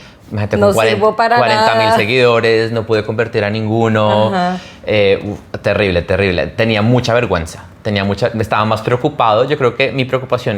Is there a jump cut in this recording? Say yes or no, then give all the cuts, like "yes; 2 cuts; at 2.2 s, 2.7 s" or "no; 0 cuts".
no; 0 cuts